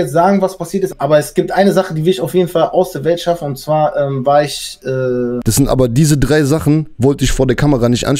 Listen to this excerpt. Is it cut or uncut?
cut